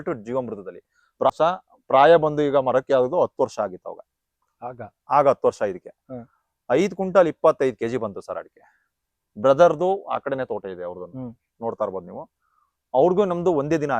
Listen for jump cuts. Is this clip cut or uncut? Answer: cut